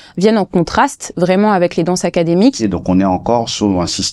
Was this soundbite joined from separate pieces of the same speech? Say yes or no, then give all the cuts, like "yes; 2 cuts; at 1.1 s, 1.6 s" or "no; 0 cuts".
yes; 1 cut; at 2.6 s